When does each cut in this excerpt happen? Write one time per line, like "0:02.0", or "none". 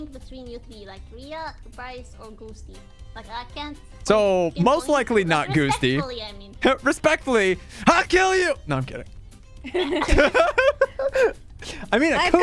none